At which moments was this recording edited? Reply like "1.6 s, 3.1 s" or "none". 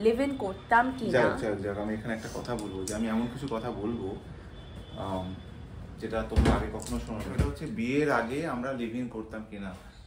none

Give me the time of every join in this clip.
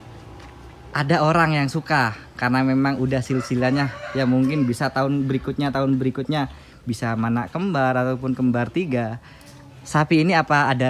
none

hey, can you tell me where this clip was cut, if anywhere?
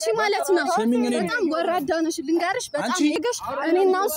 3.2 s

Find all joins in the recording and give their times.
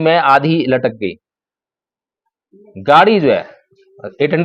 none

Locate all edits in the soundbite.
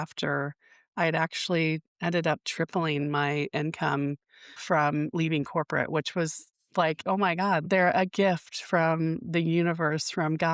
7.6 s

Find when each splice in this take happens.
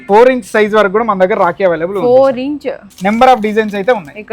2.9 s

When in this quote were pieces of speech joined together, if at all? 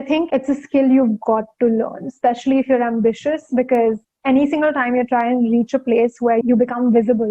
6.4 s

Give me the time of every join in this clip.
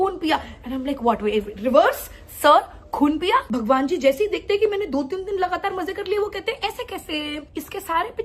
3.5 s, 7.4 s

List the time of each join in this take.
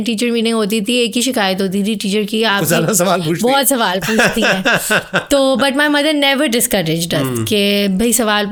none

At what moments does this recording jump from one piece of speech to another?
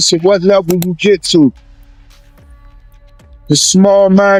none

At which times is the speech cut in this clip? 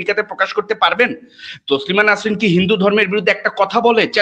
none

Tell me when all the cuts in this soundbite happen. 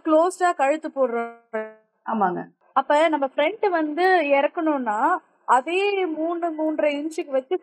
2.6 s

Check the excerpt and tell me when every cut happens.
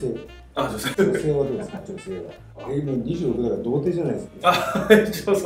0.9 s, 2.6 s

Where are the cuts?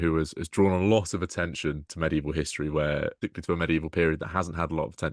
3.2 s

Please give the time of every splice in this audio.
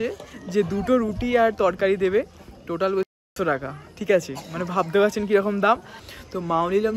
6.0 s

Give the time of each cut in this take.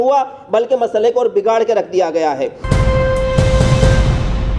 2.6 s

